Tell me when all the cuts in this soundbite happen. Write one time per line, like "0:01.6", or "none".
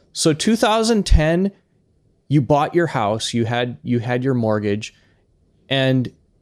none